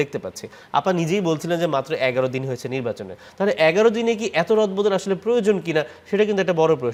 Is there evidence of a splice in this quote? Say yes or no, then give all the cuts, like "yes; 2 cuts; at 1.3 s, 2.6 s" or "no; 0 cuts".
no; 0 cuts